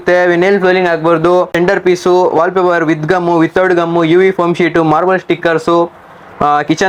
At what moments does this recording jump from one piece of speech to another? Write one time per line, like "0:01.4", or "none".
0:01.5

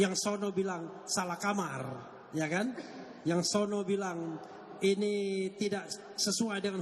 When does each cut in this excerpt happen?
none

